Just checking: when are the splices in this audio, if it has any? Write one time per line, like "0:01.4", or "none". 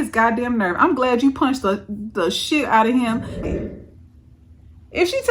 0:03.5